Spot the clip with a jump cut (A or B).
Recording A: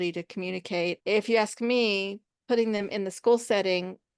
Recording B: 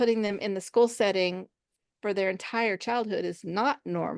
A